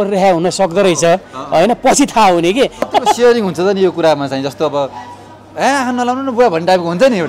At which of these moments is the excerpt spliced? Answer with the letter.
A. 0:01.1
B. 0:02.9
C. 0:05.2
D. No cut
B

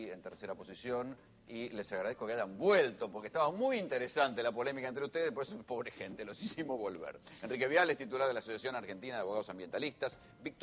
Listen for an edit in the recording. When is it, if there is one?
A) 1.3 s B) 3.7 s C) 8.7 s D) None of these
D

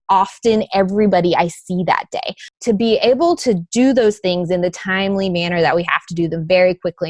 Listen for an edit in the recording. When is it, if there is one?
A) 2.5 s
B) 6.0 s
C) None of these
A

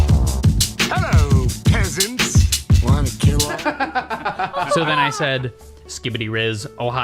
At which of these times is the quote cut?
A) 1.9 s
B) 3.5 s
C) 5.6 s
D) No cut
B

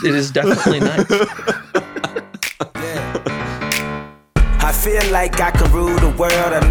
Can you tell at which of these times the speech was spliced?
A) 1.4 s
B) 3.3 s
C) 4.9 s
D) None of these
B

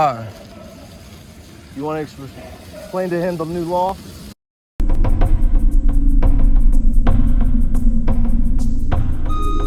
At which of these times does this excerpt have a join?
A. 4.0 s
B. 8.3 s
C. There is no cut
C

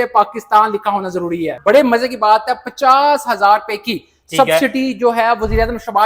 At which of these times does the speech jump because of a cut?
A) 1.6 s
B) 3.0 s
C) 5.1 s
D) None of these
A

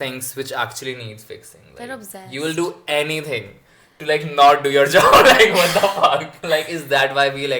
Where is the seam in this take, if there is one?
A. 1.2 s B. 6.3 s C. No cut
B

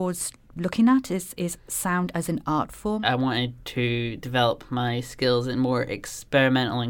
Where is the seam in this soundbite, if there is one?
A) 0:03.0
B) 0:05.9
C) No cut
A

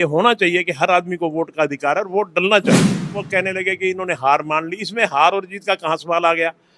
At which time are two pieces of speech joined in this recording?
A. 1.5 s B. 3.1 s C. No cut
B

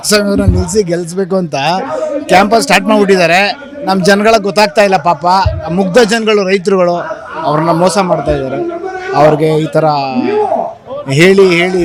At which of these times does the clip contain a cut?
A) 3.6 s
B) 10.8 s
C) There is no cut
C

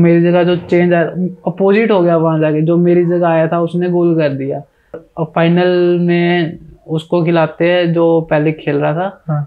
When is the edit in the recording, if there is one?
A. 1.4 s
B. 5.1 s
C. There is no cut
B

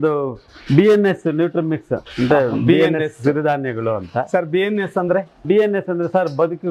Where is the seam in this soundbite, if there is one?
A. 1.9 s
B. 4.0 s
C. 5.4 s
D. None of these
C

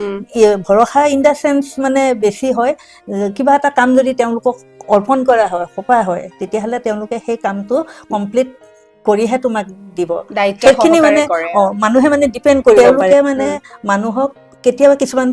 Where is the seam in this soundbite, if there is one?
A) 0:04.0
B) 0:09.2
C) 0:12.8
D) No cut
C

